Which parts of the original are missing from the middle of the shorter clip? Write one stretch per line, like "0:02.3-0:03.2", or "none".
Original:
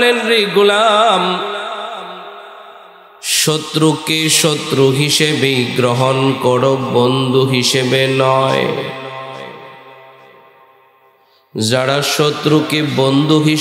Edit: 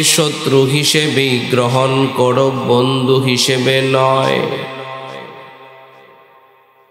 none